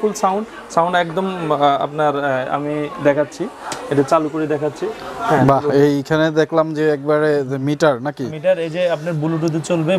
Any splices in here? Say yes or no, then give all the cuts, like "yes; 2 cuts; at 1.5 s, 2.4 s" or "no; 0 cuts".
no; 0 cuts